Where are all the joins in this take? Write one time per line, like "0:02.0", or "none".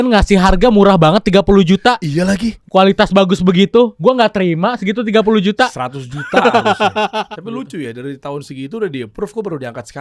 0:02.5
0:03.9
0:07.3